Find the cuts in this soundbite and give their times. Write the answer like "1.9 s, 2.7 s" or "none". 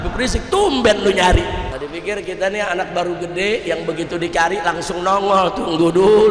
1.7 s